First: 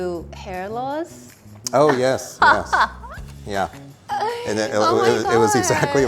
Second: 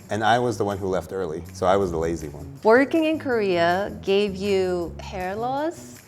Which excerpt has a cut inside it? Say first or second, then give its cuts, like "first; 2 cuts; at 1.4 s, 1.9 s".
second; 1 cut; at 2.5 s